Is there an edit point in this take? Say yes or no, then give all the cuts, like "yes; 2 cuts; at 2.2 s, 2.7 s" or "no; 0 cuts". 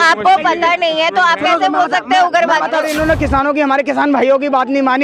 yes; 1 cut; at 2.8 s